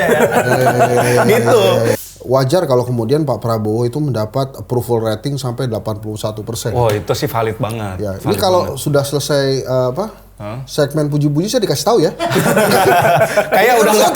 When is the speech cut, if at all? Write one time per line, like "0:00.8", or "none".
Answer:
0:01.9